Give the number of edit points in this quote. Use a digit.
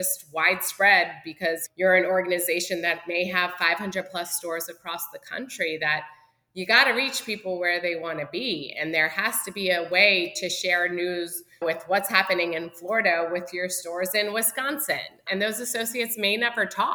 1